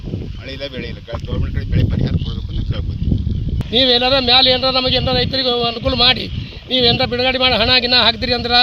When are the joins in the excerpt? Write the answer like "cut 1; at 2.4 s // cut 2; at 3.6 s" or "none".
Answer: cut 1; at 3.6 s